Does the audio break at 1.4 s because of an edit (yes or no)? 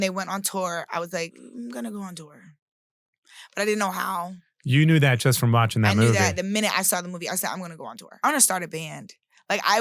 yes